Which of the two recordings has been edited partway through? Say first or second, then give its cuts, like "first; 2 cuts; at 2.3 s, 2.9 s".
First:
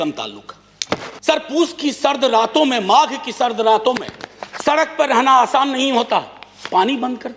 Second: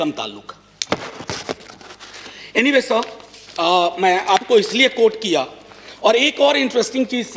first; 1 cut; at 1.1 s